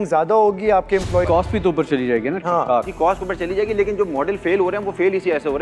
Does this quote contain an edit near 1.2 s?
yes; 1 cut; at 1.2 s

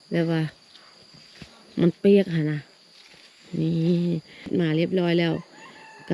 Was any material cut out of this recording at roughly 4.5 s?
yes; 1 cut; at 4.5 s

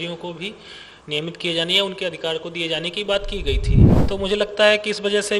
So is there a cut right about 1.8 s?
no; 1 cut; at 3.9 s

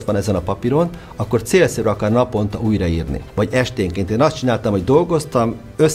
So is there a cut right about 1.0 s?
no; 1 cut; at 3.2 s

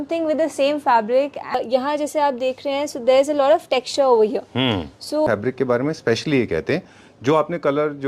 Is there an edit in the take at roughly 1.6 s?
yes; 2 cuts; at 1.6 s, 5.3 s

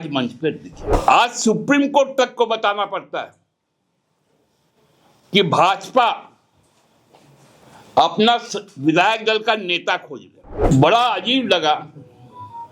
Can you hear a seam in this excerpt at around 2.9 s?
no; 2 cuts; at 1.0 s, 10.6 s

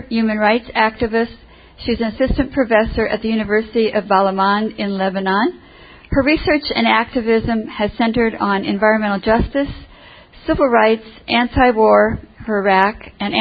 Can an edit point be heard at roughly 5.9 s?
yes; 1 cut; at 5.9 s

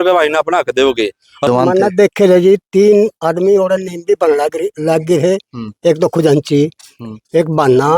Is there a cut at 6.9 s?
no; 1 cut; at 1.5 s

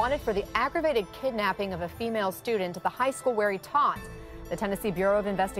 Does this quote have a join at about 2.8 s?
yes; 1 cut; at 2.8 s

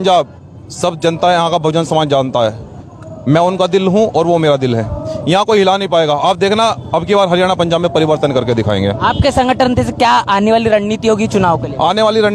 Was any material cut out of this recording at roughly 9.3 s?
no; 0 cuts

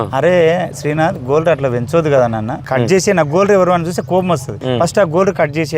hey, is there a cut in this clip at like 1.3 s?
no; 2 cuts; at 2.6 s, 4.5 s

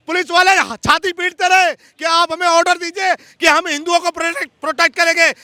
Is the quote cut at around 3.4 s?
no; 0 cuts

